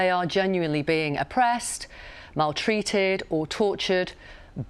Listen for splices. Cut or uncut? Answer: uncut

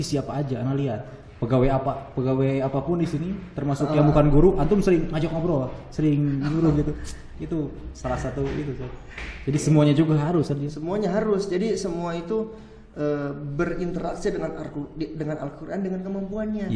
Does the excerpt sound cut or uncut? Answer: uncut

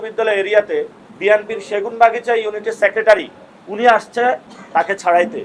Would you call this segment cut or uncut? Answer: cut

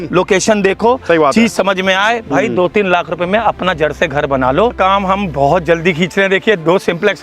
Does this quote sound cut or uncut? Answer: cut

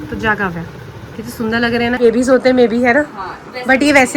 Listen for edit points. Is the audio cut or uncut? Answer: cut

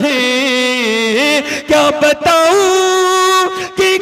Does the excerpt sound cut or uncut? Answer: uncut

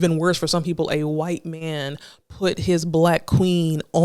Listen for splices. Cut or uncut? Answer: uncut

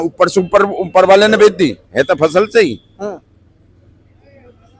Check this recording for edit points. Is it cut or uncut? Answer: uncut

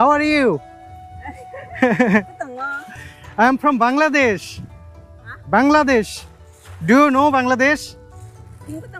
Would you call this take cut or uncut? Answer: uncut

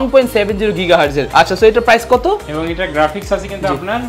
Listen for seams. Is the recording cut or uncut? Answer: cut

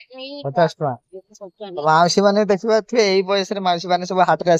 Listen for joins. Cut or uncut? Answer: uncut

